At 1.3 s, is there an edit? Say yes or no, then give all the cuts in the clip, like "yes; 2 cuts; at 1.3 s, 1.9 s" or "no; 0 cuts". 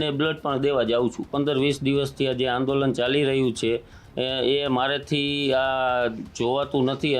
yes; 1 cut; at 1.3 s